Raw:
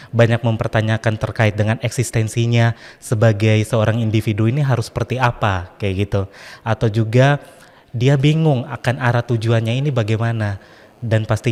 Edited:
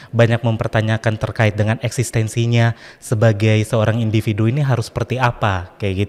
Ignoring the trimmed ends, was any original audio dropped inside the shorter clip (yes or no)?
no